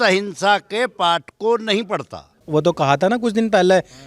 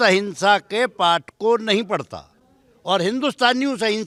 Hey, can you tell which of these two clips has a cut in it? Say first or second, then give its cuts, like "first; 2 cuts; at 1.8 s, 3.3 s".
first; 1 cut; at 2.4 s